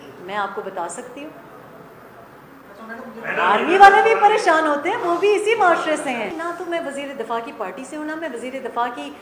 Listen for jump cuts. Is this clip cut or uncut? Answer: cut